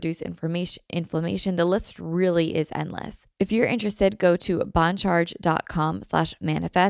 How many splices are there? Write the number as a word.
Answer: one